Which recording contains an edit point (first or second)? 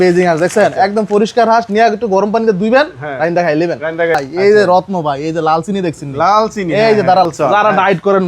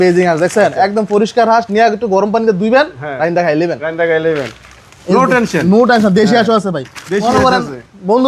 first